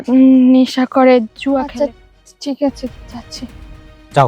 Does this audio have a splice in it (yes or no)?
yes